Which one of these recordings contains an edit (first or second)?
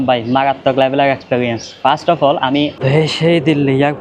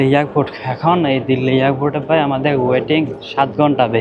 first